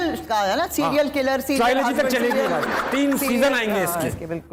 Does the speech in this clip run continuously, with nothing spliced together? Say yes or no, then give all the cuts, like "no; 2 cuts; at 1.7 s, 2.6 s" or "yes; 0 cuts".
yes; 0 cuts